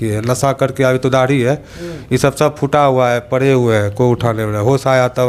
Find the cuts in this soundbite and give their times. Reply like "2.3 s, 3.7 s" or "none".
none